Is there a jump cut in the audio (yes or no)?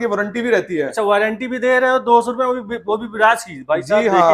no